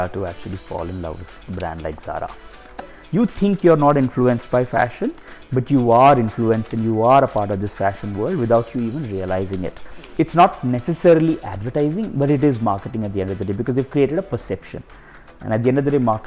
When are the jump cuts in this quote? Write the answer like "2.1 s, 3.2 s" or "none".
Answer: 2.8 s, 10.0 s

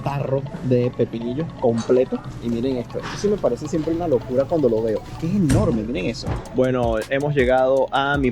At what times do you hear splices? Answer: 2.2 s, 6.3 s

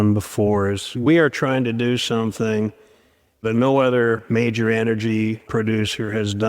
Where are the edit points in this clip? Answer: 1.0 s, 3.4 s

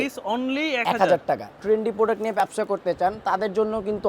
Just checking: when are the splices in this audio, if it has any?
1.6 s

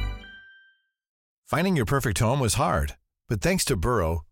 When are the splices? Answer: 1.3 s

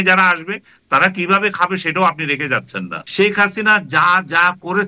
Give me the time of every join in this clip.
3.0 s

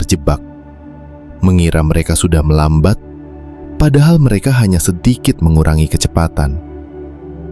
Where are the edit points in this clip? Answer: 6.6 s

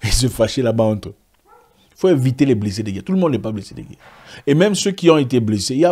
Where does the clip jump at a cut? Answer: none

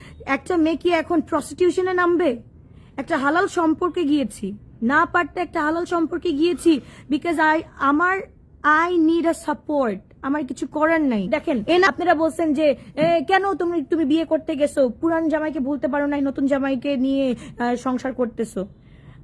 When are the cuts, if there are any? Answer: 11.9 s

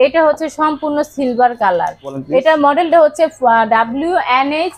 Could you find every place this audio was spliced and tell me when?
none

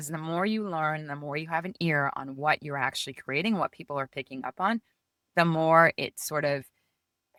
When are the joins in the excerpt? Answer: none

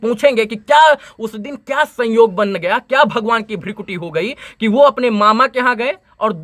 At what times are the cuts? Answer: none

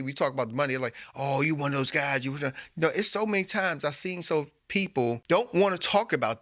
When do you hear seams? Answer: 5.2 s

